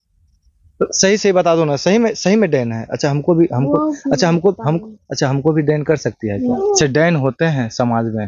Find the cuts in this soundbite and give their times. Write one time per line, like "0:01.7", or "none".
0:06.6